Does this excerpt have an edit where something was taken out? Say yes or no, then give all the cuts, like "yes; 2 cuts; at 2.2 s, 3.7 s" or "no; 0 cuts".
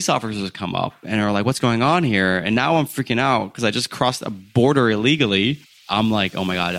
yes; 1 cut; at 5.8 s